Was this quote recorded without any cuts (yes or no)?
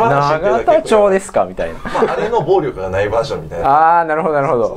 no